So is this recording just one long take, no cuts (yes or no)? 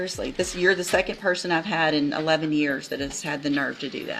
yes